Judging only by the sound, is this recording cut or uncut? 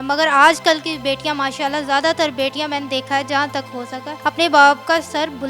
uncut